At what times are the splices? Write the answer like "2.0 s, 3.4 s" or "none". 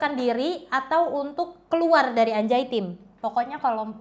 3.0 s